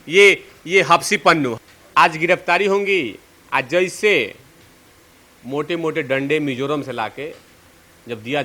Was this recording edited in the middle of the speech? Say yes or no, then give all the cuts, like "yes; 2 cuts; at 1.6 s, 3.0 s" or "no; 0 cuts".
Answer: yes; 1 cut; at 1.5 s